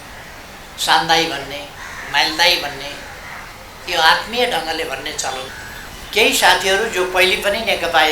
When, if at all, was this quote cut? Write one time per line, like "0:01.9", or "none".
0:05.6